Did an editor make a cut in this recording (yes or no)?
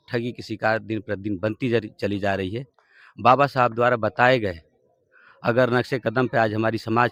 no